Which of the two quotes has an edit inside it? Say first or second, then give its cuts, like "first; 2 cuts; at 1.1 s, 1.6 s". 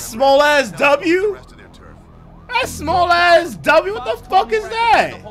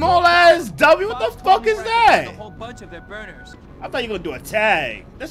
second; 1 cut; at 3.5 s